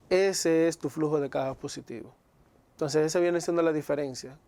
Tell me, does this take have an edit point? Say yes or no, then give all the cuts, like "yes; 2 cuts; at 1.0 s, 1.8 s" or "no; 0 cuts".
no; 0 cuts